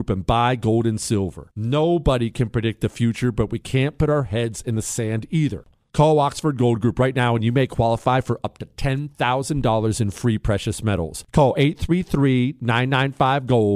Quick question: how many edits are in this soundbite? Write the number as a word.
one